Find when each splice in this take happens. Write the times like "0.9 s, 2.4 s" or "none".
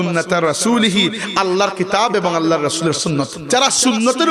3.4 s